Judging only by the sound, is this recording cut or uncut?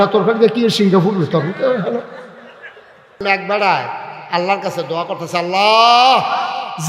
cut